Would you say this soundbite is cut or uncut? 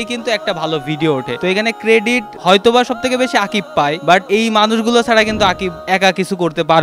cut